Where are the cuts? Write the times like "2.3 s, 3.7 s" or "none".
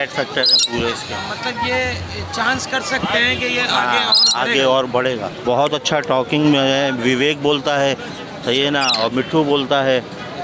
5.4 s